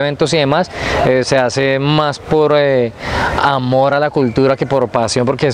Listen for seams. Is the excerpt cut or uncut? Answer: uncut